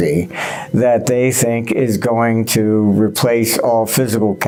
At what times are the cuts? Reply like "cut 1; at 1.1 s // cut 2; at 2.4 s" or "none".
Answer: none